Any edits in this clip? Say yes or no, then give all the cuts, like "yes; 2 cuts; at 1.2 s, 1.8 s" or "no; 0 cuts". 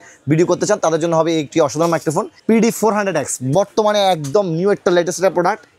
yes; 1 cut; at 2.3 s